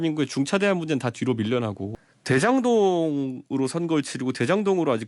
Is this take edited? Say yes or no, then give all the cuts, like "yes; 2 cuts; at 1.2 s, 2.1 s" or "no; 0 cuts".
yes; 1 cut; at 1.8 s